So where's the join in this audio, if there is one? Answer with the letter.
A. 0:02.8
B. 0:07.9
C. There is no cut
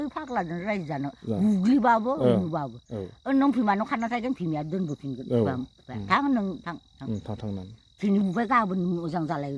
C